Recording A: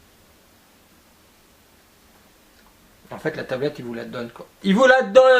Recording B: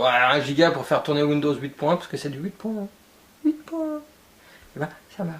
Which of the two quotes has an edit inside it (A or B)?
B